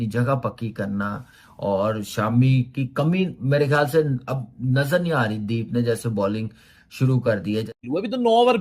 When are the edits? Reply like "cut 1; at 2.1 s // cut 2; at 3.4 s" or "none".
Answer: cut 1; at 7.7 s